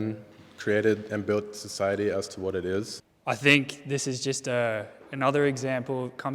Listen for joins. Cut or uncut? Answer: cut